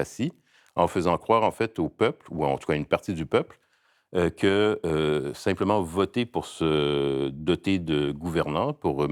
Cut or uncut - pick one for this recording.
uncut